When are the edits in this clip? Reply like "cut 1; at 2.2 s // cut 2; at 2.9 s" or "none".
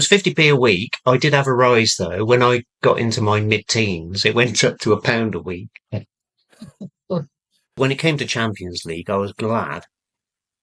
cut 1; at 7.8 s